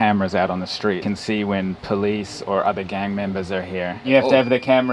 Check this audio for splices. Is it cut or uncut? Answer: cut